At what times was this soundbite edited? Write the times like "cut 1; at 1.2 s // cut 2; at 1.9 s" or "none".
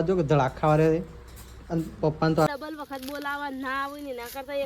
cut 1; at 2.5 s